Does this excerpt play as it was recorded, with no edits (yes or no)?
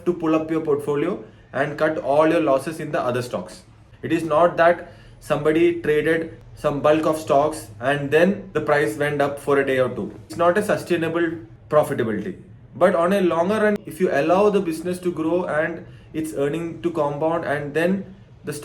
no